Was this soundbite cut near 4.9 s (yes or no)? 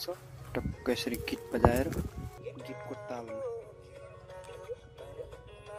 no